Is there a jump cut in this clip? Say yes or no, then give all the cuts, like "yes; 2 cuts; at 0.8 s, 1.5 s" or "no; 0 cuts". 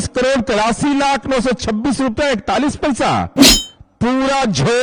no; 0 cuts